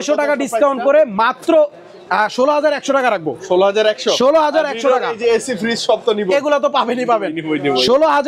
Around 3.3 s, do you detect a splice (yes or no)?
no